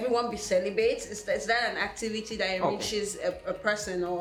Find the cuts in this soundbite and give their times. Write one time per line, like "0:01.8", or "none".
none